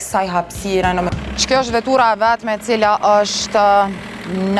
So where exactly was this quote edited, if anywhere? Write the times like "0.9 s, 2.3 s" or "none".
1.1 s

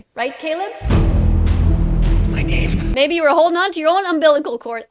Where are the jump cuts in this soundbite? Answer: 2.9 s

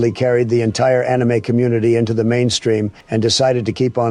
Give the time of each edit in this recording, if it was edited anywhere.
3.0 s

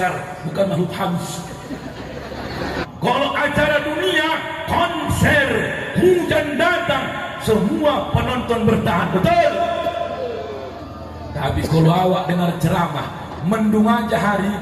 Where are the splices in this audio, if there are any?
2.8 s

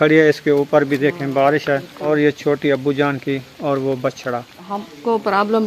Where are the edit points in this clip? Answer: 2.0 s, 4.6 s

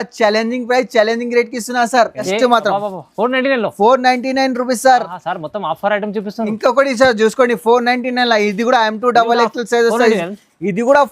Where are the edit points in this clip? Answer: 2.3 s

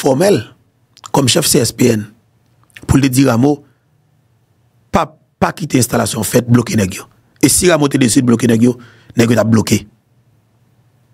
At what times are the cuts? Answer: none

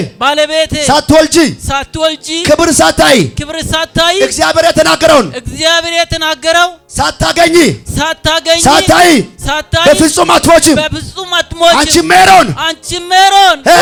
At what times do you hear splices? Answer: none

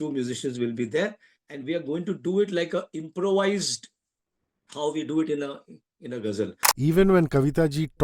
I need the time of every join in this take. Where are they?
6.6 s

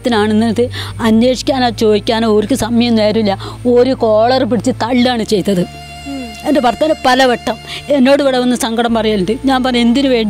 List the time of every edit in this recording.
none

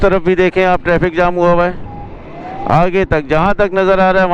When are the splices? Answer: none

